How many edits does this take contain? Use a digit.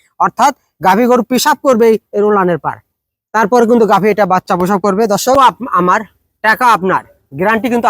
1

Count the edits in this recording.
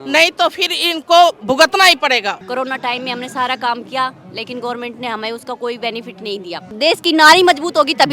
2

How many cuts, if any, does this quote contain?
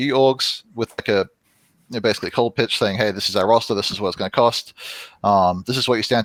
0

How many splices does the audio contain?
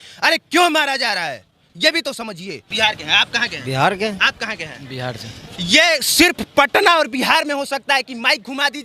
1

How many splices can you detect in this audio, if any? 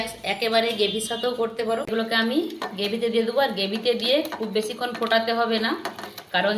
1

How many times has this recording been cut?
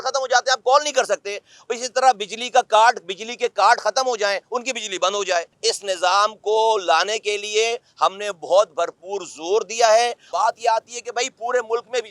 2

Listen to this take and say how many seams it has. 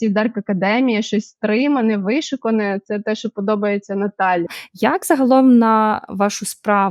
1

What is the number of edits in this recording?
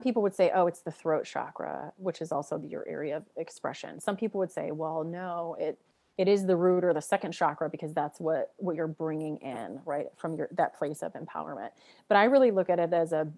0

